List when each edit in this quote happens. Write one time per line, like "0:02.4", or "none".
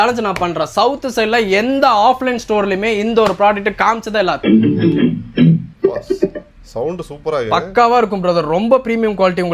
0:04.4
0:05.7